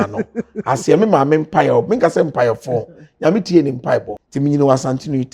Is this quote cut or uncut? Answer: cut